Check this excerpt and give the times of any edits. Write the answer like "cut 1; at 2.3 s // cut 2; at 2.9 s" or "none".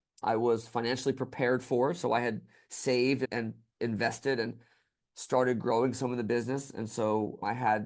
none